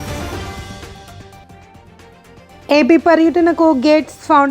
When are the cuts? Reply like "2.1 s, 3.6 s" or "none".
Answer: 1.2 s